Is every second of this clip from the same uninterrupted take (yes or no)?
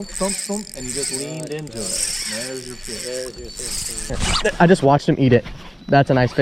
no